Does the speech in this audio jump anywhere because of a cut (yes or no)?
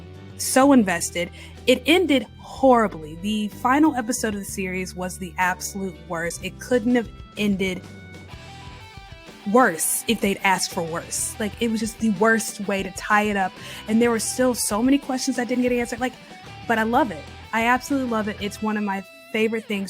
no